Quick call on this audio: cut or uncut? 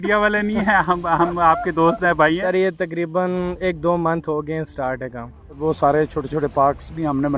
cut